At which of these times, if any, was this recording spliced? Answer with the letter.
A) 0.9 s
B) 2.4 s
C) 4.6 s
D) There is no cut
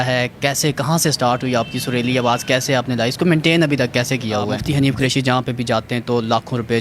C